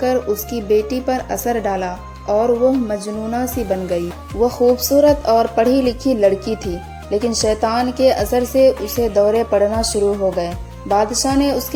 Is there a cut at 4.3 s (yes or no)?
no